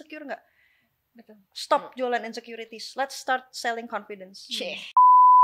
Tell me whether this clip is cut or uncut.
uncut